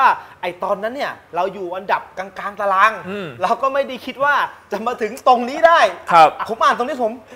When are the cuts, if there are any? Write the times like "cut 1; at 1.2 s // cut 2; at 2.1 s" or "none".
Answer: none